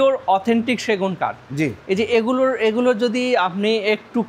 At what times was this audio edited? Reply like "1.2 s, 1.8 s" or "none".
none